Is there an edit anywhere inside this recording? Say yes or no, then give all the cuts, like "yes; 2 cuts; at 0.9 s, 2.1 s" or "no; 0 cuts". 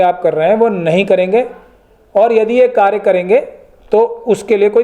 no; 0 cuts